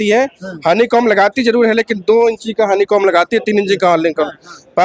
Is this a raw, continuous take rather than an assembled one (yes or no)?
yes